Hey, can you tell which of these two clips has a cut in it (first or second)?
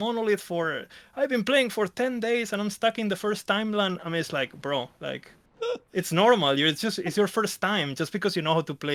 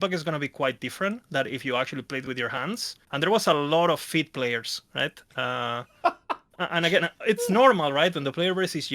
second